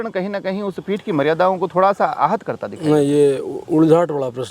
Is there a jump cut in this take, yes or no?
no